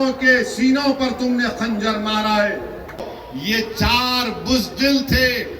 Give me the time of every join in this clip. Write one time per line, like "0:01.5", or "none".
0:03.0